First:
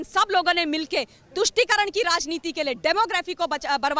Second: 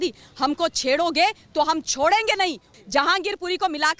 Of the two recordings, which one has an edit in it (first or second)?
second